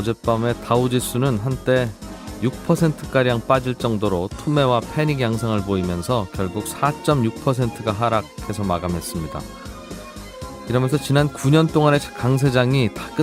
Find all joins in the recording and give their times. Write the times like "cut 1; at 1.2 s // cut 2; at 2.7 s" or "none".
none